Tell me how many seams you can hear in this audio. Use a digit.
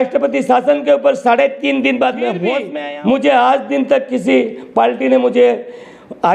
1